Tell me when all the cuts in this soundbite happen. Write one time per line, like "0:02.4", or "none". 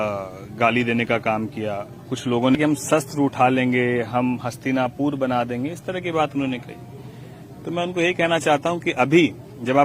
0:02.6